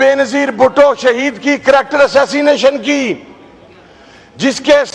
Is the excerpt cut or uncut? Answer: uncut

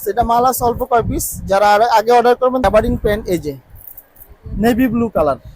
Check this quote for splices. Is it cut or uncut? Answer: cut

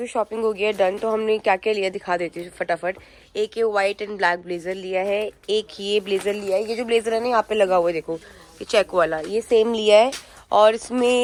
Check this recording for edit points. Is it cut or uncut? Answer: uncut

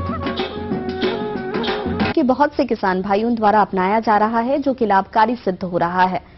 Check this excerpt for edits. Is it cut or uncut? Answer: uncut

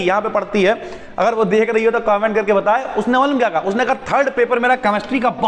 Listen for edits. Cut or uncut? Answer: uncut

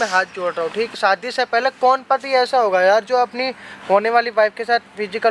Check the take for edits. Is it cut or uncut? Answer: cut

